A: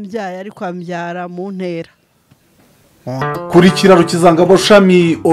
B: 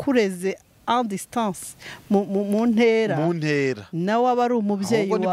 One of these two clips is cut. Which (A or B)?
A